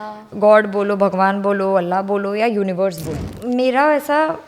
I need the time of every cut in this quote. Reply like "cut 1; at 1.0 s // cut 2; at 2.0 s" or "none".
cut 1; at 3.2 s

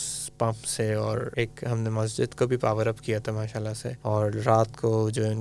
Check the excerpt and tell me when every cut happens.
cut 1; at 1.3 s // cut 2; at 3.9 s

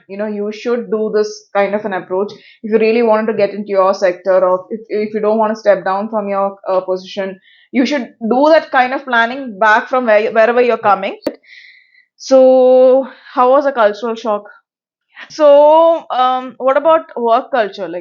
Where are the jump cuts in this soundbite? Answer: cut 1; at 11.3 s // cut 2; at 15.2 s

